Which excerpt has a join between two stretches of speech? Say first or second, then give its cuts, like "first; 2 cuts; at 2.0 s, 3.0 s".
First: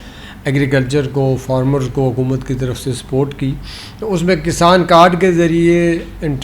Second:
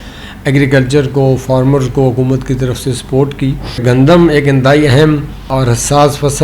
second; 2 cuts; at 3.8 s, 5.5 s